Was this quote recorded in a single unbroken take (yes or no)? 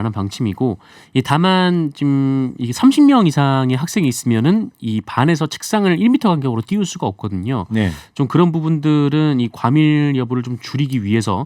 yes